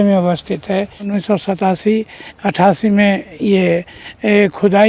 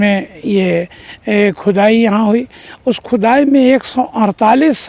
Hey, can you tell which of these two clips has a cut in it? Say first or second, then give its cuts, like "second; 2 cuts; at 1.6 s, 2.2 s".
first; 1 cut; at 1.1 s